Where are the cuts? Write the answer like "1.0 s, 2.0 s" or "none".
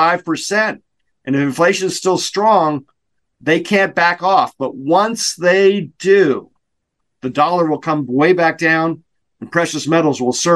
none